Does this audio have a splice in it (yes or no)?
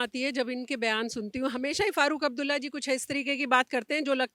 no